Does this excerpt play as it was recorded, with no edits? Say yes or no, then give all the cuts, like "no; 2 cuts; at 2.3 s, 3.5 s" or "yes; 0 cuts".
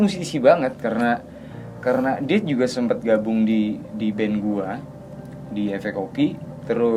yes; 0 cuts